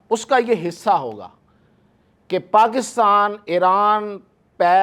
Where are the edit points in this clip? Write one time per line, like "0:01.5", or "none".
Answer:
none